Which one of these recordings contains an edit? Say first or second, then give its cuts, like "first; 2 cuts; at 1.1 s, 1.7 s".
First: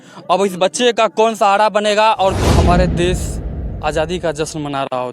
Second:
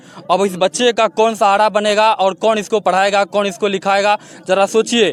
first; 1 cut; at 2.4 s